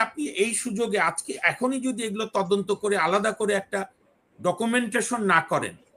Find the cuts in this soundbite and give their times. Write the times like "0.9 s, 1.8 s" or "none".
none